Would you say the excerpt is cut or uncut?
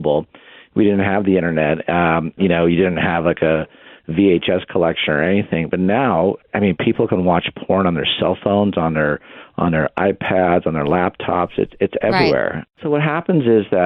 cut